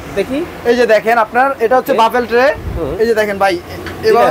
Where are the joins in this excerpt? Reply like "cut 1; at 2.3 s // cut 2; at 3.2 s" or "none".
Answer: none